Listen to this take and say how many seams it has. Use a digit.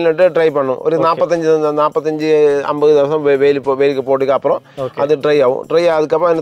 0